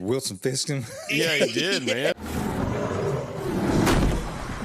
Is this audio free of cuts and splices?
no; 1 cut; at 2.2 s

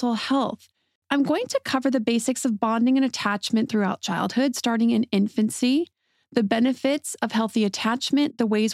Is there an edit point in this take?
yes; 1 cut; at 1.0 s

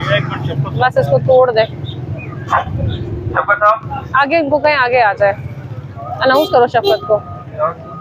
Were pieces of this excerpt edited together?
no; 0 cuts

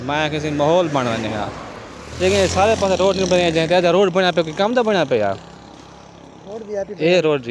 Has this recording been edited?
no; 0 cuts

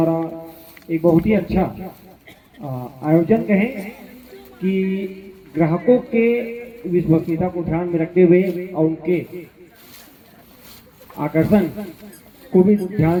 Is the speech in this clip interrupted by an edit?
no; 0 cuts

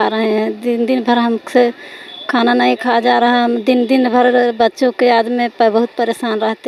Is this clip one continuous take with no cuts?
yes; 0 cuts

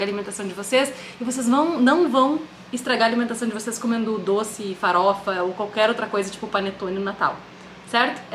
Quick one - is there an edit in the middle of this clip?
no; 0 cuts

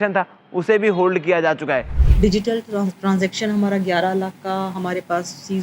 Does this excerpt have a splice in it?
yes; 1 cut; at 2.0 s

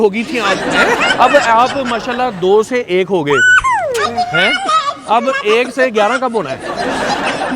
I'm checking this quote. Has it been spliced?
yes; 1 cut; at 1.1 s

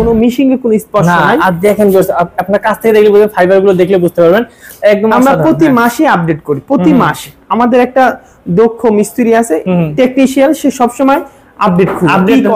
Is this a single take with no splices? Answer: yes; 0 cuts

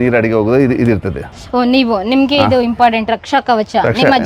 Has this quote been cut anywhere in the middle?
no; 0 cuts

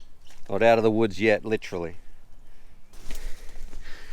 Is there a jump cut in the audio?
yes; 1 cut; at 2.9 s

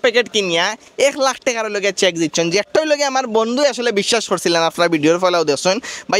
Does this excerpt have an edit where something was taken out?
no; 0 cuts

